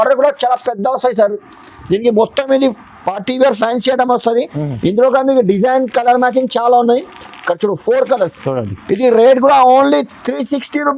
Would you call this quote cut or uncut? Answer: uncut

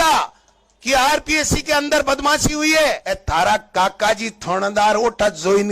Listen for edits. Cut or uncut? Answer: cut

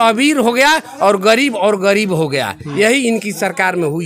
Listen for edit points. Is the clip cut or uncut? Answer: uncut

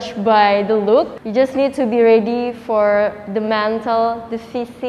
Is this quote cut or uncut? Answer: uncut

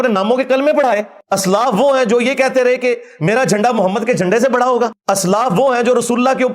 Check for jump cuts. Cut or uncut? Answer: cut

